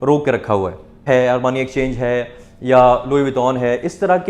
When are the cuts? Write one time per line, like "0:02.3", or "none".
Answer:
0:01.1